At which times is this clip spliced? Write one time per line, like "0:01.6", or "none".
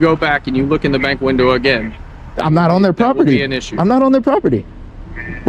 none